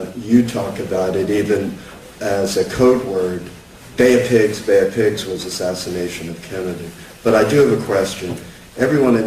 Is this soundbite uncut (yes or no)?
yes